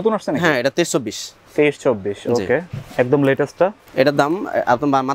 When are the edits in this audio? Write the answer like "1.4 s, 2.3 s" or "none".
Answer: 3.8 s